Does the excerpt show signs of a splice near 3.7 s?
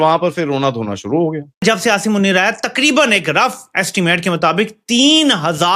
no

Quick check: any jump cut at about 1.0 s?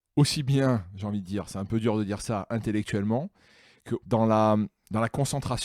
no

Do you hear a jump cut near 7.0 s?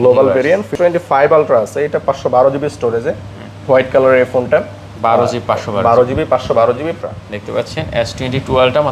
yes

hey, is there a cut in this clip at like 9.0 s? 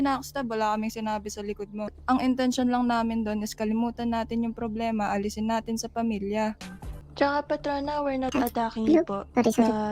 no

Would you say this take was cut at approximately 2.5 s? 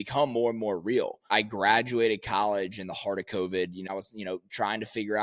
no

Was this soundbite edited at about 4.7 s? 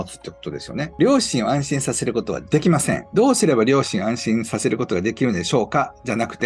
no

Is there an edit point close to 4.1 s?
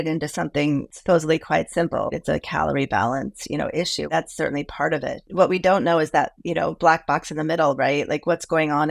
yes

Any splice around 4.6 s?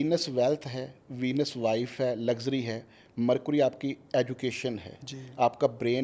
no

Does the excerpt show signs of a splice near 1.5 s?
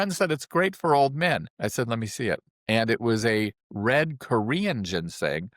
yes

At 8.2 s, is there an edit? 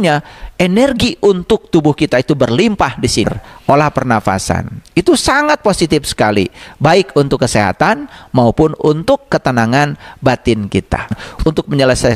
no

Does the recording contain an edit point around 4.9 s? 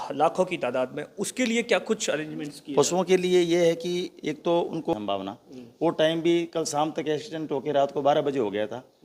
yes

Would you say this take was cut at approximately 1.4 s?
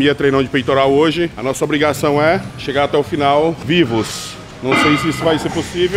yes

